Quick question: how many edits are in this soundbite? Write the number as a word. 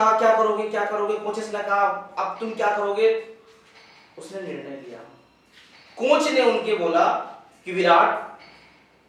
zero